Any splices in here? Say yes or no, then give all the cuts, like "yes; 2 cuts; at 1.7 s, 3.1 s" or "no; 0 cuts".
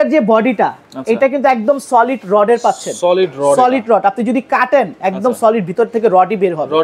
no; 0 cuts